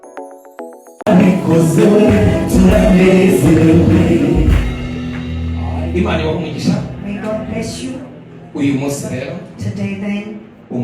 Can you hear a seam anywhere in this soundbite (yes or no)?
yes